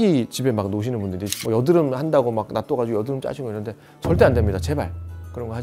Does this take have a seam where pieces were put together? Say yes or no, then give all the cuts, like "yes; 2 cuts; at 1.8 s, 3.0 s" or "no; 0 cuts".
yes; 1 cut; at 1.2 s